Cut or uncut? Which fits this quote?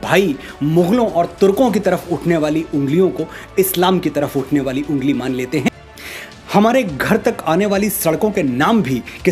cut